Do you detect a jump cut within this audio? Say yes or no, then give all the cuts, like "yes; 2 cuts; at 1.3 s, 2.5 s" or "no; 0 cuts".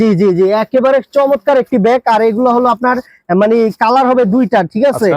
no; 0 cuts